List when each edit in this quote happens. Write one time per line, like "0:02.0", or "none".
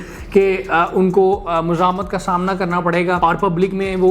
0:03.2